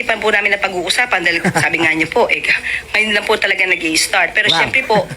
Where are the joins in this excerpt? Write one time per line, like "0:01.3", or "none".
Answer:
0:02.0